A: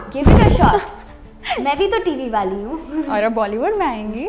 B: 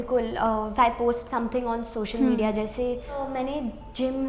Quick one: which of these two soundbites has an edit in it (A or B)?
B